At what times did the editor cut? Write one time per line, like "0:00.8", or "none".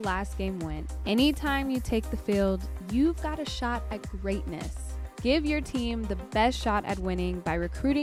none

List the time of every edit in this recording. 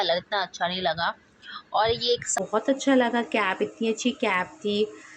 0:02.3

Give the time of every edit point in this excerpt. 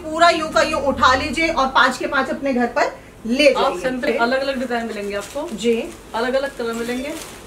0:04.0

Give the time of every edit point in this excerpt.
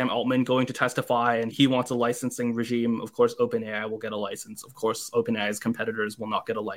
0:01.5

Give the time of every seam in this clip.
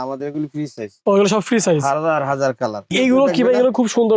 0:02.9

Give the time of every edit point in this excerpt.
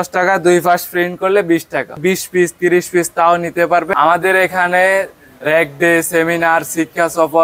0:02.0
0:03.9

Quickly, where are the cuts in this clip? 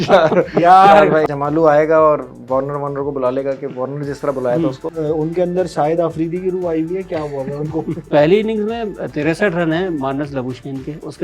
0:01.2
0:04.9
0:08.1

